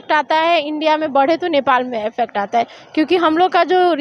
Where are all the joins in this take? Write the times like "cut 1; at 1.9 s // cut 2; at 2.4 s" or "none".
none